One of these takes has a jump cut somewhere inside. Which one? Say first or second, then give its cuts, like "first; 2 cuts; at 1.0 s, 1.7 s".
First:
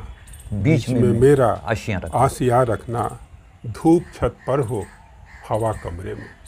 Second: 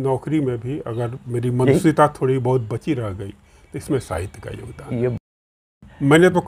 second; 1 cut; at 5.3 s